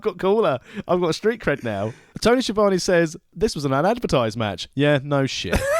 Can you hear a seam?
yes; 1 cut; at 2.1 s

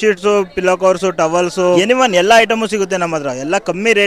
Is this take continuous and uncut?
no; 1 cut; at 1.8 s

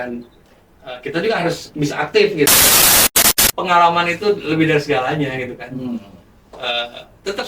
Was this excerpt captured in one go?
no; 1 cut; at 3.0 s

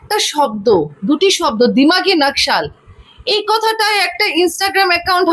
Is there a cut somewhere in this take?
no; 0 cuts

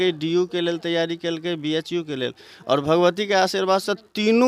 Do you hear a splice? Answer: no; 0 cuts

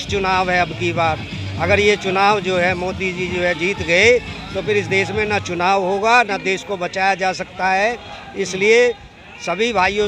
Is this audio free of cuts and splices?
yes; 0 cuts

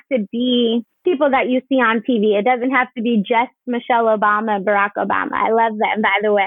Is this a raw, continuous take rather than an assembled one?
no; 1 cut; at 0.9 s

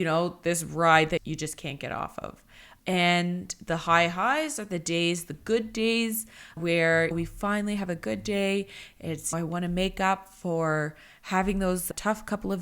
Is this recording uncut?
no; 1 cut; at 1.2 s

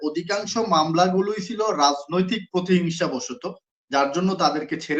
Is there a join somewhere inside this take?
no; 0 cuts

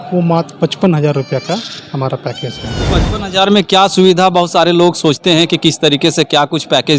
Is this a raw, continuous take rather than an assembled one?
no; 1 cut; at 2.9 s

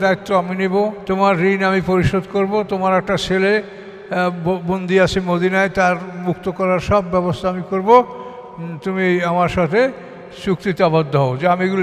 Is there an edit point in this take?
yes; 1 cut; at 1.0 s

